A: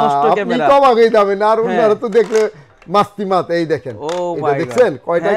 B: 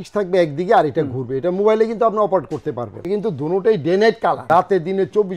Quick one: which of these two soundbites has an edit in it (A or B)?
B